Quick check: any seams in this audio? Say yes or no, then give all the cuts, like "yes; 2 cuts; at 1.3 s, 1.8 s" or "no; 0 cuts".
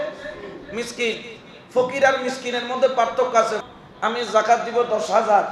yes; 1 cut; at 3.6 s